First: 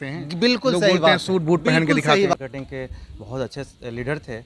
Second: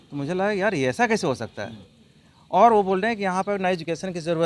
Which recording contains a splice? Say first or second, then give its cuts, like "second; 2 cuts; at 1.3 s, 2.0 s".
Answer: first; 1 cut; at 2.3 s